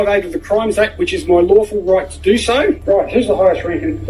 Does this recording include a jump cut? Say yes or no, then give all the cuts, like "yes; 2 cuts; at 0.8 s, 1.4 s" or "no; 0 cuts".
yes; 1 cut; at 2.8 s